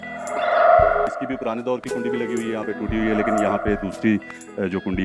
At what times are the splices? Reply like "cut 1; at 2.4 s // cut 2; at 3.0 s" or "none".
cut 1; at 1.1 s